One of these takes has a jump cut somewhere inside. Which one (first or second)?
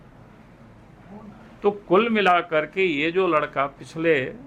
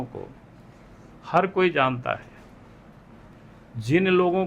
second